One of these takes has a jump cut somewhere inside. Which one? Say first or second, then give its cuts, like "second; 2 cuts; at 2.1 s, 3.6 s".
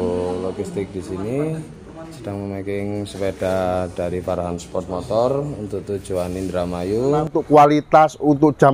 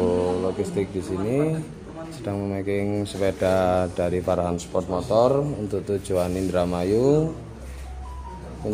first; 1 cut; at 7.4 s